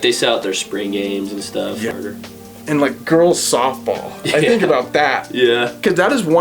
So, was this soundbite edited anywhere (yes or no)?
yes